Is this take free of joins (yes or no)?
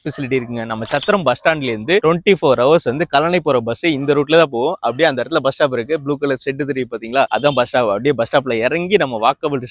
yes